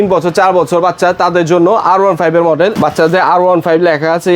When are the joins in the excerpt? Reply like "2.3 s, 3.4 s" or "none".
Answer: none